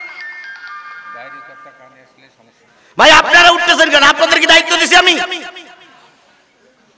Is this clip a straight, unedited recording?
yes; 0 cuts

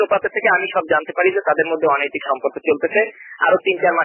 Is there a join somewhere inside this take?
no; 0 cuts

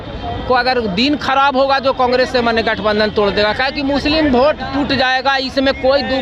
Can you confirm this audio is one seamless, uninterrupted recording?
yes; 0 cuts

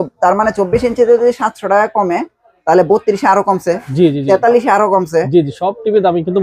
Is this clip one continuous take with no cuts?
yes; 0 cuts

